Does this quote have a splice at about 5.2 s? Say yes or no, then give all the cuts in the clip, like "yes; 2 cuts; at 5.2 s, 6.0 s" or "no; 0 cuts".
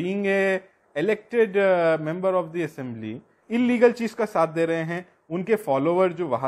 no; 1 cut; at 3.4 s